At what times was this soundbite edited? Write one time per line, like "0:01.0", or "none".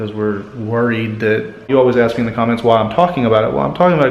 0:01.7